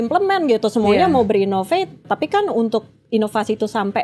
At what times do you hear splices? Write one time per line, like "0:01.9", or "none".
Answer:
0:02.0